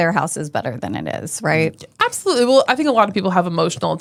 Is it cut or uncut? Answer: uncut